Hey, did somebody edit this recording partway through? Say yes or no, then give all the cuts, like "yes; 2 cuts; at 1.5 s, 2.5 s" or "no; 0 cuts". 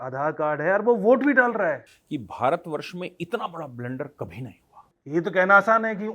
yes; 2 cuts; at 1.9 s, 4.9 s